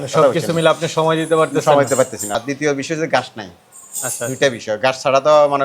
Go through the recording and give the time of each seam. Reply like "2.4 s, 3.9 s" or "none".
2.4 s